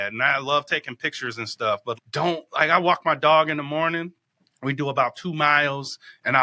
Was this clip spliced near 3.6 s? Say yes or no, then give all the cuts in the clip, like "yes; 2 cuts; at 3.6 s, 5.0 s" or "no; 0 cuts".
no; 1 cut; at 2.0 s